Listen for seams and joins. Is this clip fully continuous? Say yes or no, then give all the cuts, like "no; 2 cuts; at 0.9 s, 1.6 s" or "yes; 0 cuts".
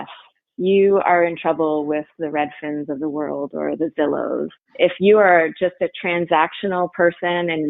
no; 1 cut; at 4.6 s